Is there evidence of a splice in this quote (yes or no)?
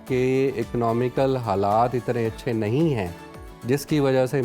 no